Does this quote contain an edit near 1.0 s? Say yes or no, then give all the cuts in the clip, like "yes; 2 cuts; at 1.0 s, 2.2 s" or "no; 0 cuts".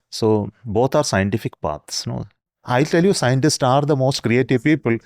no; 1 cut; at 2.5 s